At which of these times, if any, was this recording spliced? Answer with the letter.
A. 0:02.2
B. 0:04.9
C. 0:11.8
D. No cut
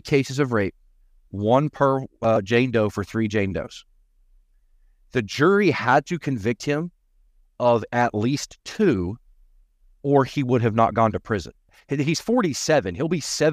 C